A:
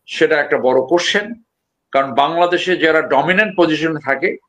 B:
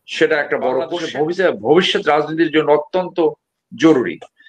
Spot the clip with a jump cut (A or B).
B